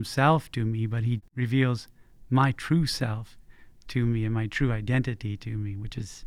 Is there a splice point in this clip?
yes; 1 cut; at 1.2 s

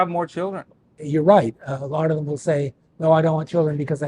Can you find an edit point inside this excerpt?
yes; 1 cut; at 1.0 s

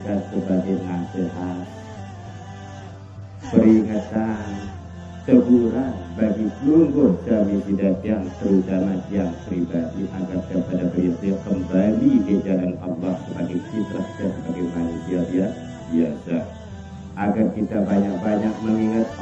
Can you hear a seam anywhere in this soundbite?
yes; 2 cuts; at 1.7 s, 2.9 s

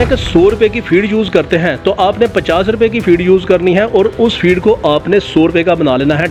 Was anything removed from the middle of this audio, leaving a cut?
no; 0 cuts

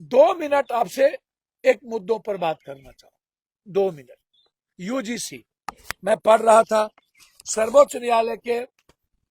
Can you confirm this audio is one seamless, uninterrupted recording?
yes; 0 cuts

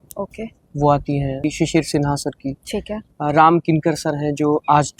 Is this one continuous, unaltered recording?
no; 1 cut; at 1.4 s

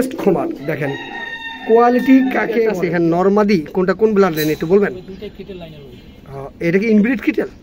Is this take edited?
yes; 1 cut; at 2.7 s

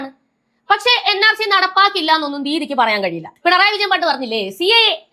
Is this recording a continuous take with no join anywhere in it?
no; 1 cut; at 3.3 s

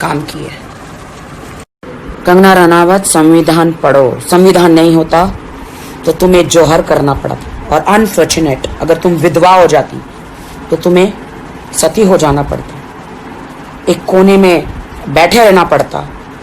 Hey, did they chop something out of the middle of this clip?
no; 0 cuts

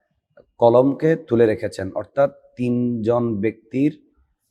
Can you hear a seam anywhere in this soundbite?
no; 0 cuts

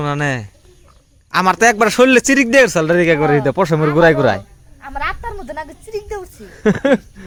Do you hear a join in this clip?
no; 0 cuts

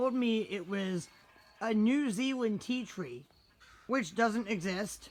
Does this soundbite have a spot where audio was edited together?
no; 0 cuts

